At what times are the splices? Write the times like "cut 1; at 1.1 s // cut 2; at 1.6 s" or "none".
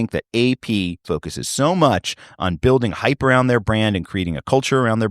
cut 1; at 1.0 s